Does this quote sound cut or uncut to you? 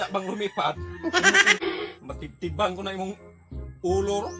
cut